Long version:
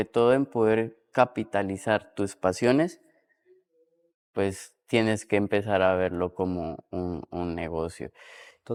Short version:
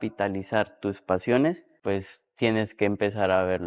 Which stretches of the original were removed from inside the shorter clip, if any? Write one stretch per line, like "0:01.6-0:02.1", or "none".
0:03.0-0:04.2